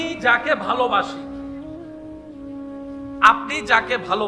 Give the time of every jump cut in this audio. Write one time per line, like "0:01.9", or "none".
0:01.1
0:03.2